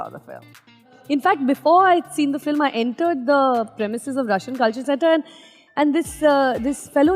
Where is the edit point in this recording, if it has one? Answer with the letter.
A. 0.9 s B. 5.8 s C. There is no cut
A